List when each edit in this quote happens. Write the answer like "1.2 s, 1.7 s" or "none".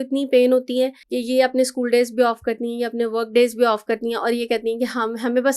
1.1 s

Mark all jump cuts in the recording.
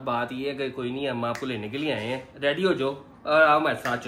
none

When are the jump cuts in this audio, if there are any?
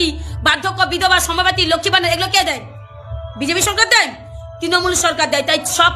none

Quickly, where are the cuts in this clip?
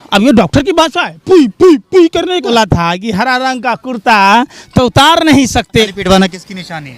2.5 s, 5.9 s

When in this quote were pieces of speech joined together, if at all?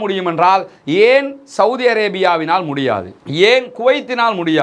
none

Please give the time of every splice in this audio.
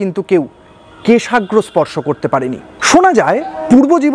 2.7 s

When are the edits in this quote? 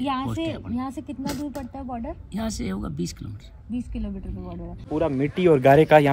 4.8 s

